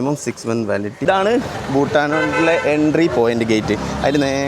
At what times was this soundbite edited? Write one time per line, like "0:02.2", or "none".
0:01.0